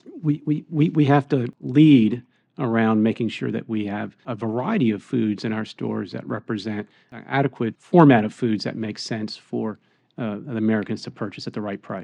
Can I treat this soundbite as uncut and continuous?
no; 2 cuts; at 4.2 s, 7.3 s

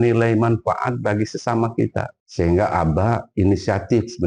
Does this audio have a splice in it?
yes; 1 cut; at 2.2 s

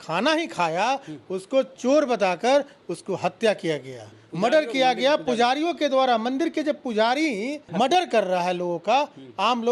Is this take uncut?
yes; 0 cuts

